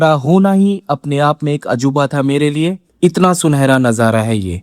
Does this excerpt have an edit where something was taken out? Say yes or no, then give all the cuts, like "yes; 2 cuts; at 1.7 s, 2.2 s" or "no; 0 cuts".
yes; 1 cut; at 2.9 s